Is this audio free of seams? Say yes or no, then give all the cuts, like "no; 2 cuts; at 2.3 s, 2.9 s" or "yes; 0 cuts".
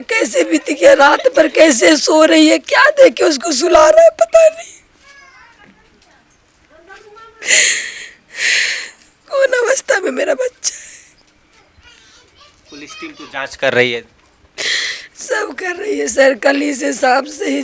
yes; 0 cuts